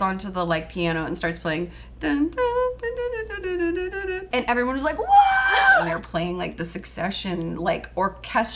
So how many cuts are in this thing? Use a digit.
2